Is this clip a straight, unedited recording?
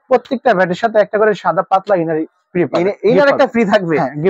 yes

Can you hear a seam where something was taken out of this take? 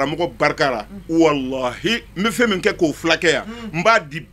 no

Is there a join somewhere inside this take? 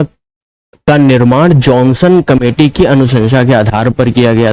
no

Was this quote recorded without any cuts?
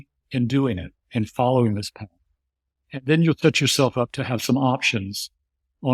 yes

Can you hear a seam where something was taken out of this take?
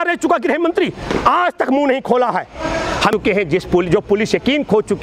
yes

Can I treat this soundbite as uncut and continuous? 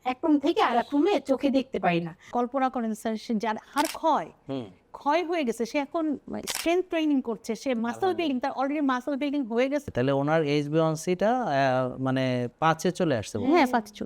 no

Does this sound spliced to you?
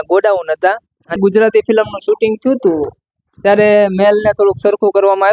yes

